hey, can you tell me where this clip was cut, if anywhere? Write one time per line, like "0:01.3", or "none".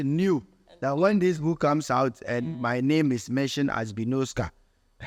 none